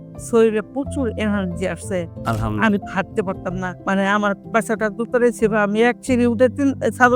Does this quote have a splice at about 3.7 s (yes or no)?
yes